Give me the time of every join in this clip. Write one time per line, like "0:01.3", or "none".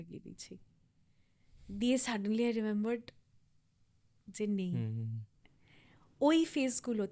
none